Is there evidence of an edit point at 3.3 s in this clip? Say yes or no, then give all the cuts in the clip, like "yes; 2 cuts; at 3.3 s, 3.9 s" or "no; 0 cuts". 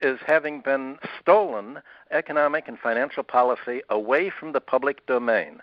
no; 2 cuts; at 0.9 s, 2.0 s